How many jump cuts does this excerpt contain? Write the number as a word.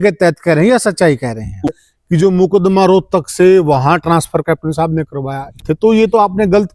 two